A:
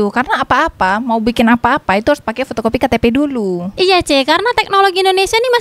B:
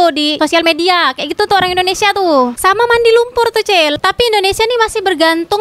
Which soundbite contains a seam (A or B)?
B